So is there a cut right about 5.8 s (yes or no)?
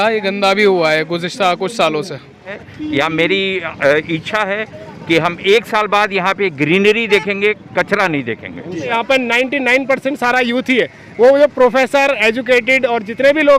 no